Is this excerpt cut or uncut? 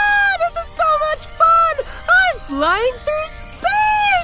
uncut